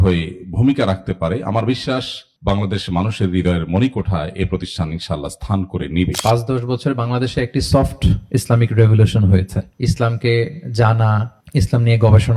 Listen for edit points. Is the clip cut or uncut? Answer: cut